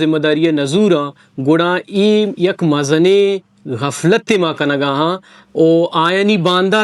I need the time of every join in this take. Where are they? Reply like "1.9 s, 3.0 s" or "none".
none